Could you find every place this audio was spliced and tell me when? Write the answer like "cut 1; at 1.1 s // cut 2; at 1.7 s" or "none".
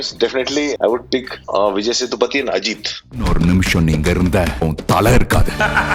none